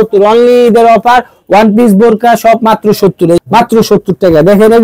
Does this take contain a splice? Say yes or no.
yes